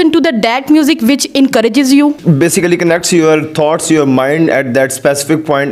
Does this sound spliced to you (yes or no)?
yes